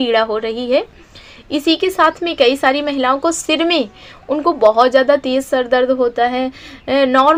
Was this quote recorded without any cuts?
yes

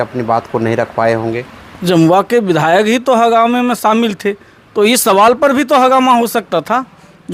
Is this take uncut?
yes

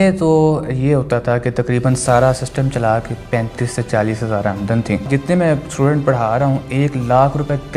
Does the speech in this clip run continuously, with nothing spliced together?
no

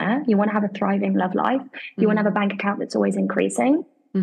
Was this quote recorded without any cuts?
yes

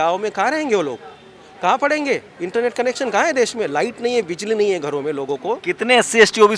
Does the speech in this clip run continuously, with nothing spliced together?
yes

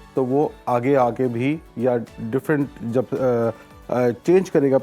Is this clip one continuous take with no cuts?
yes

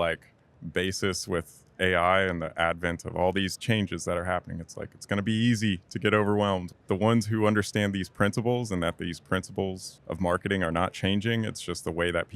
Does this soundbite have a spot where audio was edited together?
yes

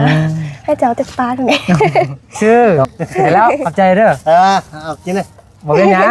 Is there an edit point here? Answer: yes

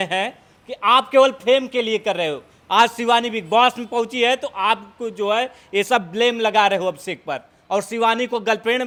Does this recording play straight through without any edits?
yes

